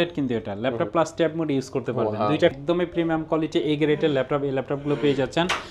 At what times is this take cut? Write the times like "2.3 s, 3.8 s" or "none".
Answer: 2.5 s